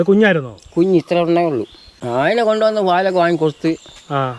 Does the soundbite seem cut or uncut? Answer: cut